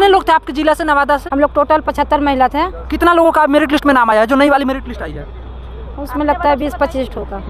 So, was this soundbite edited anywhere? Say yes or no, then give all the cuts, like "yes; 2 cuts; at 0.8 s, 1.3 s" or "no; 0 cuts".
yes; 1 cut; at 1.2 s